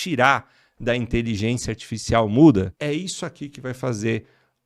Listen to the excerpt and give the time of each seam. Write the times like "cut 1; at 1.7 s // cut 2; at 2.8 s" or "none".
cut 1; at 2.7 s